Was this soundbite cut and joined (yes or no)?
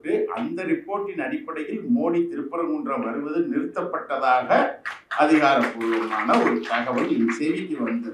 no